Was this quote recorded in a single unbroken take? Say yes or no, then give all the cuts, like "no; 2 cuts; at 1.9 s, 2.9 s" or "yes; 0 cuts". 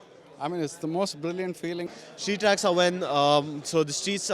no; 1 cut; at 1.8 s